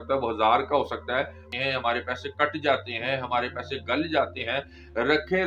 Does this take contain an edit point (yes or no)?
yes